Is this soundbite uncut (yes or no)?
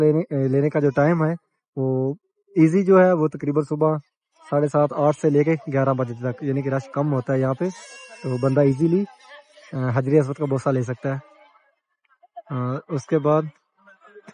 yes